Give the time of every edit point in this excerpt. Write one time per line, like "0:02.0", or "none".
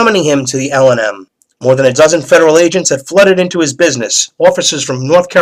0:04.4